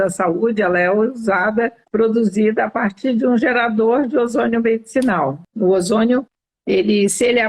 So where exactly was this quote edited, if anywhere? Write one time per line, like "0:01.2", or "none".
0:01.8
0:05.4